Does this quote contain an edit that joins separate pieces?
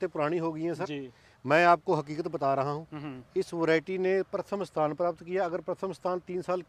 no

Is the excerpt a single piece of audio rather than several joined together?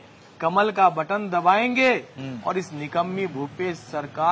yes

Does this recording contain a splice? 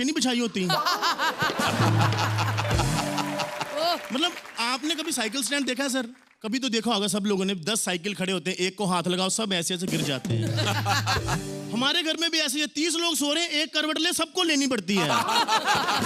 no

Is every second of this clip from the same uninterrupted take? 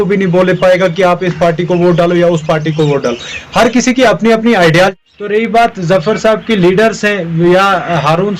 no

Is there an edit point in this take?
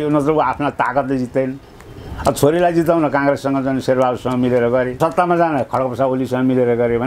yes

